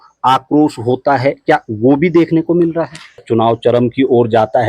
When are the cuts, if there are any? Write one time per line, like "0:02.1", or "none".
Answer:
0:03.2